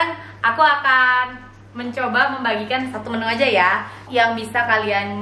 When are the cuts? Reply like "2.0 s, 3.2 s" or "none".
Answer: 4.0 s